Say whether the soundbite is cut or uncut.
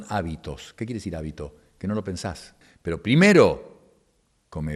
cut